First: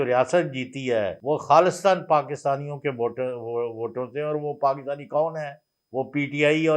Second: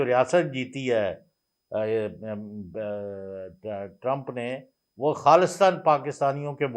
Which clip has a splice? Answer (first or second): first